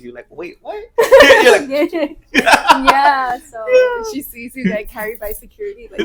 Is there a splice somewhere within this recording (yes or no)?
no